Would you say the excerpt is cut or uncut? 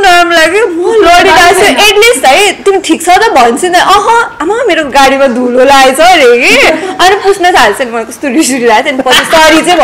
uncut